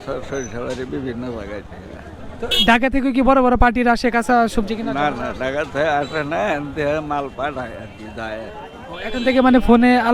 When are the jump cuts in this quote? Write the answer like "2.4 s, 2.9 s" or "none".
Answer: none

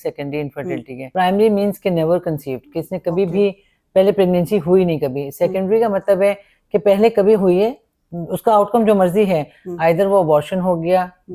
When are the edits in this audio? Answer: none

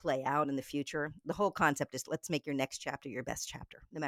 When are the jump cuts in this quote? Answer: none

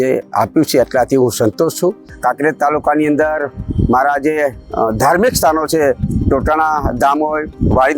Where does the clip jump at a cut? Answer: 2.1 s

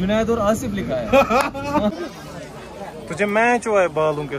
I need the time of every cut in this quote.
1.9 s

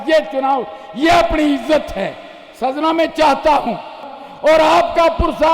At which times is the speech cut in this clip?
4.1 s

